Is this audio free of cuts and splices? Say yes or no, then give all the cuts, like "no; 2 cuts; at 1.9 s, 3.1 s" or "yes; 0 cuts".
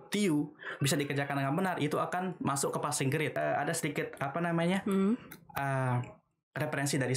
no; 1 cut; at 3.3 s